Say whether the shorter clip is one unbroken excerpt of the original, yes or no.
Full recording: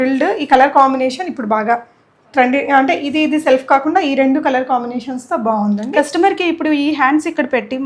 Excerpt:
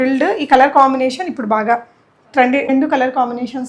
no